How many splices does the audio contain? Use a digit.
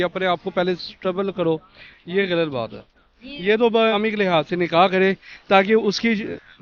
1